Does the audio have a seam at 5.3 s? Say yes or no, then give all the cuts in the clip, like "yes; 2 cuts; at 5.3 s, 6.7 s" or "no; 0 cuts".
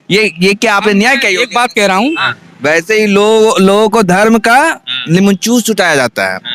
no; 1 cut; at 2.1 s